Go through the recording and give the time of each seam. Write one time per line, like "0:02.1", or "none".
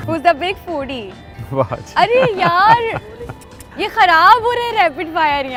none

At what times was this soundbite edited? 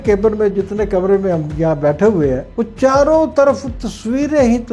0:02.5

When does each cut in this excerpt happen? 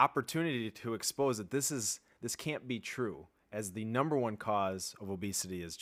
none

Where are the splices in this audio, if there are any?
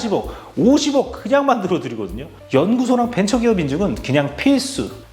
0:02.4

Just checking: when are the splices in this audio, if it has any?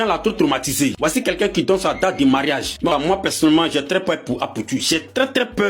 0:02.9

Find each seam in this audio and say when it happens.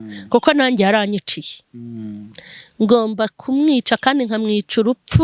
none

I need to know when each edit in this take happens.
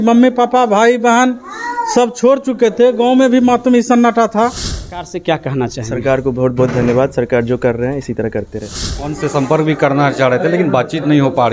0:05.1
0:09.2

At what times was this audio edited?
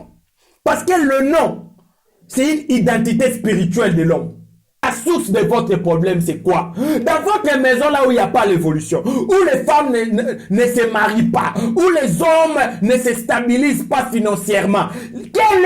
0:04.8

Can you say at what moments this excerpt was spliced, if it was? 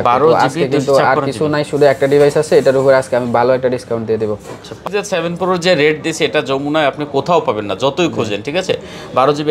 0:04.8

